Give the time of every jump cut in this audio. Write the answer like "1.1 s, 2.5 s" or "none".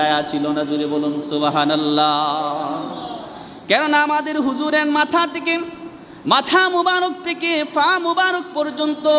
none

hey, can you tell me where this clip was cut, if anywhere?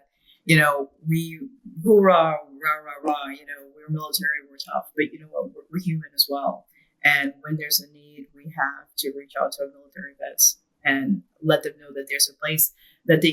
none

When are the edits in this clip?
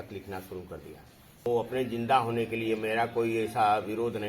1.5 s

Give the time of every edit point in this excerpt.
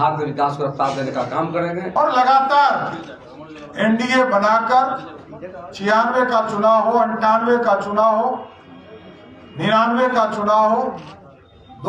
1.9 s

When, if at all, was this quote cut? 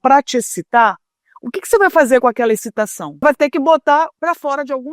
3.2 s, 4.1 s

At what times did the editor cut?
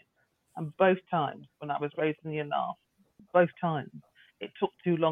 3.2 s

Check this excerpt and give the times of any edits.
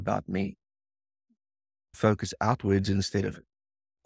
2.0 s

